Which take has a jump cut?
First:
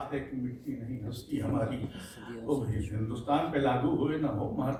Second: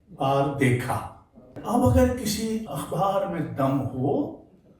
second; 2 cuts; at 1.5 s, 2.6 s

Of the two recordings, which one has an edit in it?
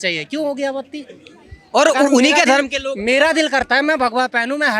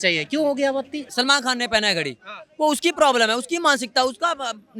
second; 1 cut; at 1.1 s

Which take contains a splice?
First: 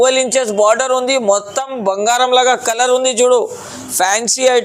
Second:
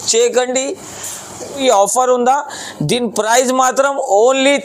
second; 1 cut; at 1.6 s

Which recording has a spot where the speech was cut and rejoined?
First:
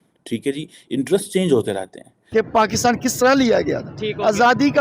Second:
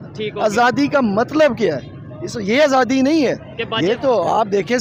first; 1 cut; at 2.1 s

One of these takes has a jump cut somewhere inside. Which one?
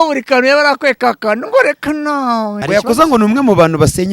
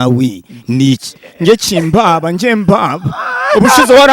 first; 1 cut; at 2.6 s

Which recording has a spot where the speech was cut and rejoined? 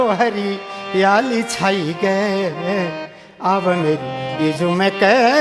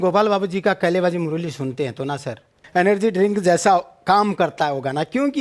second; 1 cut; at 2.6 s

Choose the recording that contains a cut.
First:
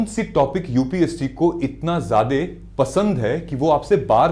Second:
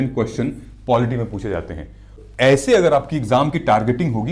second; 1 cut; at 2.2 s

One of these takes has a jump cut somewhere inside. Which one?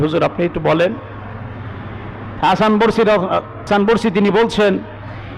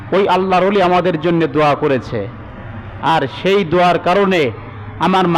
first; 1 cut; at 3.7 s

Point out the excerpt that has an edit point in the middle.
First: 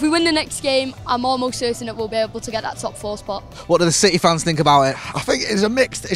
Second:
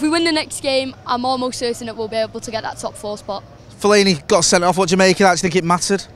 first; 1 cut; at 3.5 s

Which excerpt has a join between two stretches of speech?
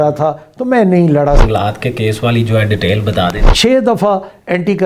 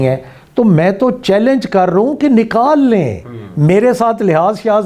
first; 2 cuts; at 1.4 s, 3.4 s

